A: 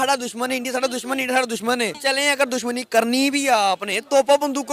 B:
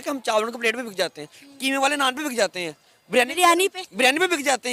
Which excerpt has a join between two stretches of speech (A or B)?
A